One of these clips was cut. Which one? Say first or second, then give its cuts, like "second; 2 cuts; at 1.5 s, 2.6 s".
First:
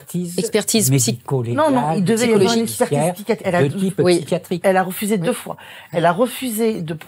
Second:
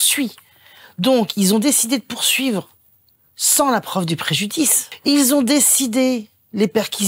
second; 1 cut; at 4.9 s